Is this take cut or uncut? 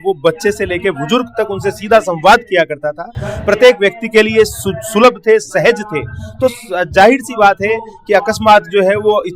uncut